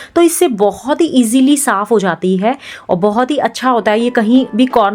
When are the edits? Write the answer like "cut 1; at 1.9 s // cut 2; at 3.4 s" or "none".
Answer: none